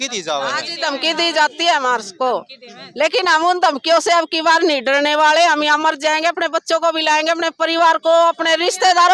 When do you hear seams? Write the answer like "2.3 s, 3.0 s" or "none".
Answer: none